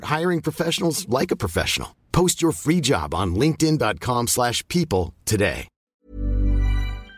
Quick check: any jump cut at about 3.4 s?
no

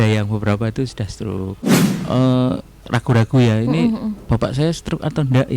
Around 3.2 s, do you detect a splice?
no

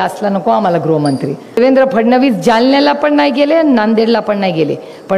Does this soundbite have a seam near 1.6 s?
yes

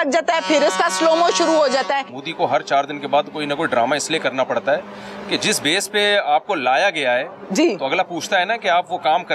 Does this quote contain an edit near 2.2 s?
yes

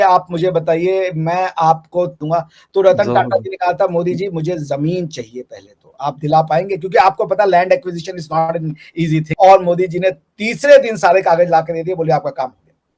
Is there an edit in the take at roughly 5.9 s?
no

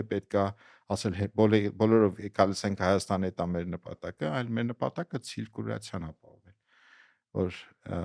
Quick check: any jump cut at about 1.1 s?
no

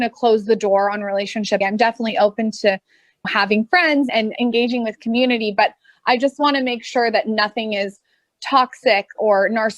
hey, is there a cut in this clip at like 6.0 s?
no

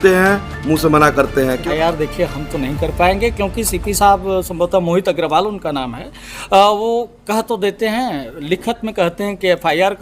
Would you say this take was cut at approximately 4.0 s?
no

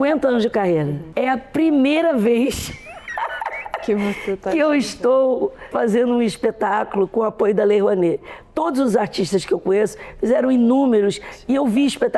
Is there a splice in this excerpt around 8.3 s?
no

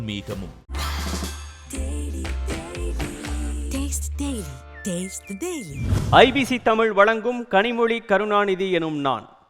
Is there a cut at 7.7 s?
no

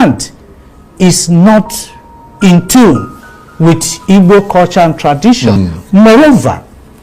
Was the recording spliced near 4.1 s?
no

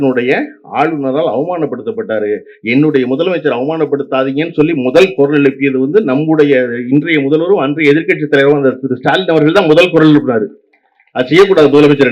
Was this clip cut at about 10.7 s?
no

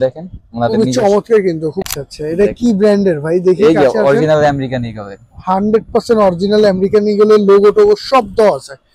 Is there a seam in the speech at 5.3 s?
no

